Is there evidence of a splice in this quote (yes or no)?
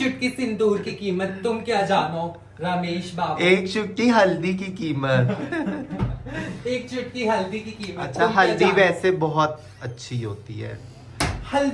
no